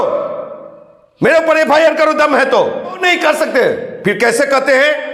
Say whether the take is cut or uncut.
cut